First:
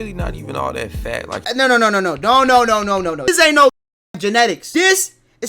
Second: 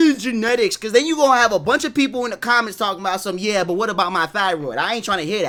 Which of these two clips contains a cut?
first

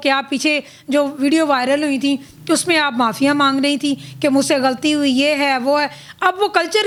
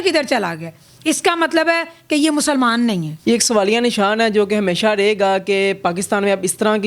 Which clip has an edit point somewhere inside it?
second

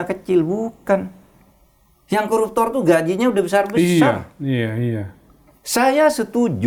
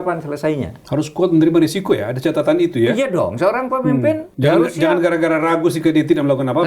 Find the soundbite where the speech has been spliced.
second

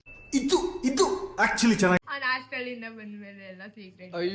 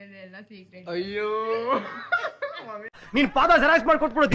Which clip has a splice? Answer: first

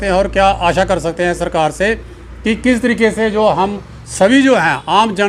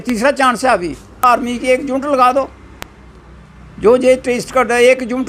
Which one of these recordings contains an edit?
second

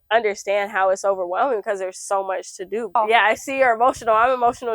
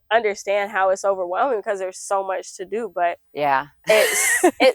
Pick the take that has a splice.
first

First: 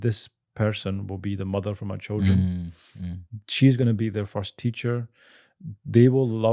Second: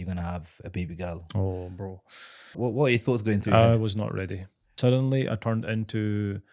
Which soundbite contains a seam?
second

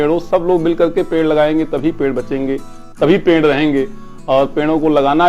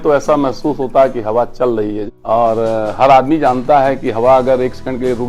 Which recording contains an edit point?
second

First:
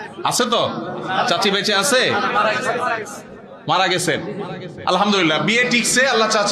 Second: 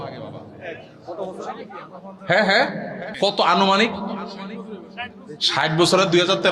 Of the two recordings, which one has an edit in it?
second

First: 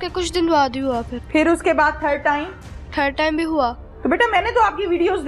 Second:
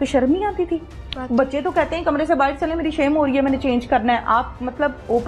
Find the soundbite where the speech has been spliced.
first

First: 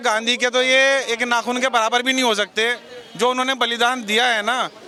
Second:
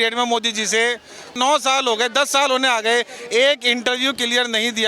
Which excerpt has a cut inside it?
second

